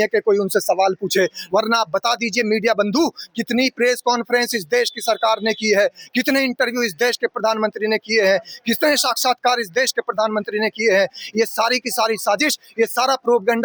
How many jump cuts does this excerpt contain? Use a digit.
0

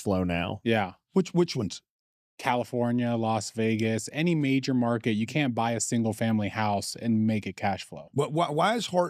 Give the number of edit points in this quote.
1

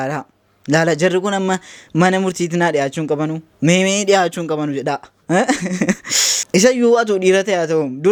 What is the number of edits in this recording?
0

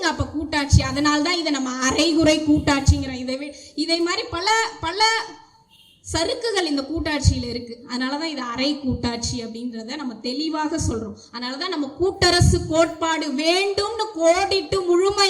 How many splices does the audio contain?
0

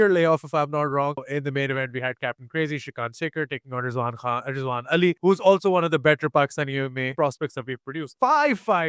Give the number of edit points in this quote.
4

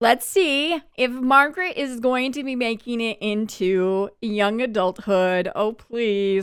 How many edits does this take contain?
0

